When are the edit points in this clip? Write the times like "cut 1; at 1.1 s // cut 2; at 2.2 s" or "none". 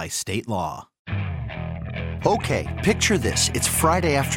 cut 1; at 0.9 s

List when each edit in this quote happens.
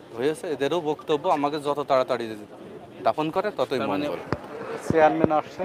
cut 1; at 4.2 s

